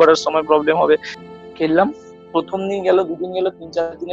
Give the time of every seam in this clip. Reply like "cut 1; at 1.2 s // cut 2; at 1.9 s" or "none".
cut 1; at 1.2 s